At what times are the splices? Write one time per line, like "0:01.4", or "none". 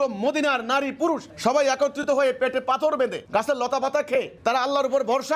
0:01.3
0:03.2
0:04.3